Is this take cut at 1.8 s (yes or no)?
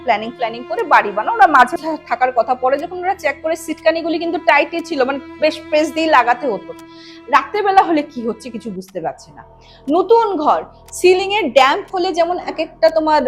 yes